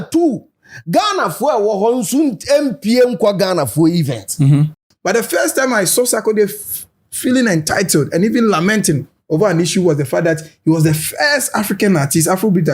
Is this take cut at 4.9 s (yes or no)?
yes